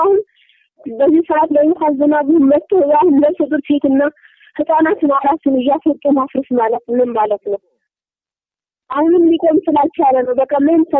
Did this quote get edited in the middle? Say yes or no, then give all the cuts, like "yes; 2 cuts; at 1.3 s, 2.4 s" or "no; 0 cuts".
yes; 1 cut; at 2.5 s